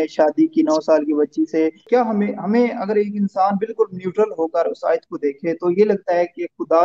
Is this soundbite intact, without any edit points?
no; 1 cut; at 1.8 s

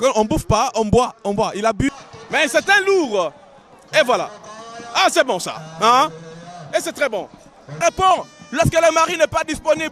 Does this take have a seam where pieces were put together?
yes; 2 cuts; at 1.9 s, 7.7 s

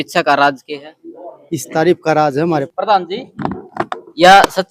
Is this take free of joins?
no; 1 cut; at 2.7 s

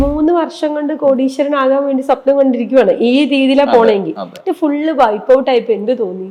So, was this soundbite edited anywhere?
no; 0 cuts

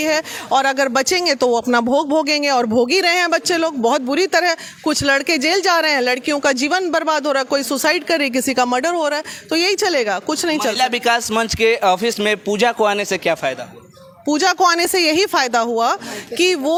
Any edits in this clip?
no; 0 cuts

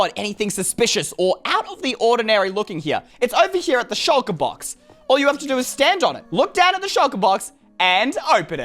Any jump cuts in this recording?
yes; 2 cuts; at 3.1 s, 6.2 s

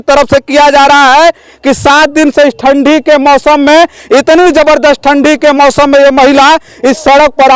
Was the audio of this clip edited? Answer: no; 0 cuts

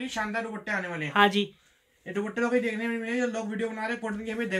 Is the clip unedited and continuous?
yes; 0 cuts

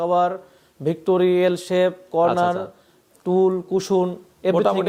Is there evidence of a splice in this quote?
no; 0 cuts

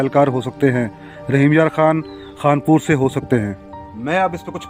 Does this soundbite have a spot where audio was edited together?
no; 0 cuts

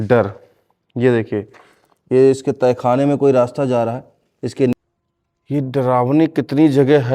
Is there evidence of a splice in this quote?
yes; 1 cut; at 4.7 s

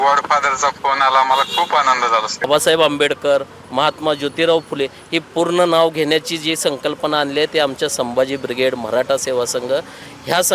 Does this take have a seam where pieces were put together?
yes; 1 cut; at 2.5 s

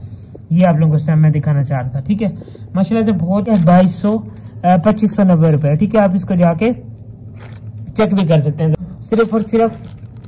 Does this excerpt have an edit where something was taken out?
yes; 2 cuts; at 3.5 s, 8.7 s

